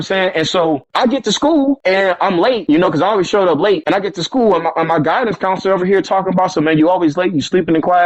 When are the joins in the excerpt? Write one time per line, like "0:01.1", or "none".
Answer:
0:00.9
0:01.8
0:02.6
0:03.8